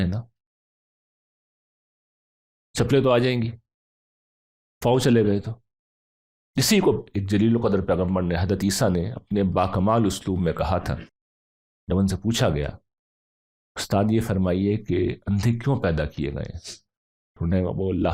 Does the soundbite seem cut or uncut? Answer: uncut